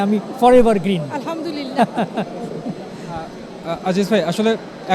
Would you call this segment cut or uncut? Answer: uncut